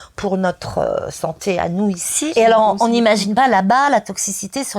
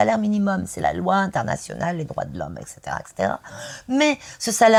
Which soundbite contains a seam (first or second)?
first